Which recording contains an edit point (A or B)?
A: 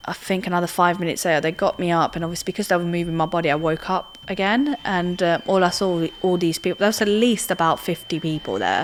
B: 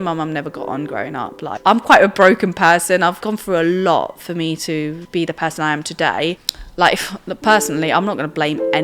B